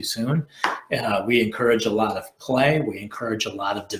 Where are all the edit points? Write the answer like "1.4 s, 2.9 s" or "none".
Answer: none